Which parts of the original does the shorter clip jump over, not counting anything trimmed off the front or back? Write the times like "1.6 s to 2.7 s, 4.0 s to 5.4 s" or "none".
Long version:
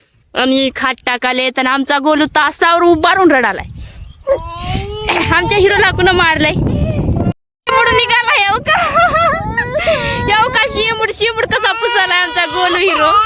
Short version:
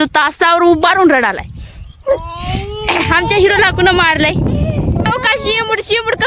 7.3 s to 10.5 s